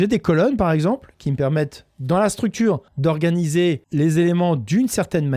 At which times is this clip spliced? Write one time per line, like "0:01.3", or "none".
0:02.9
0:03.8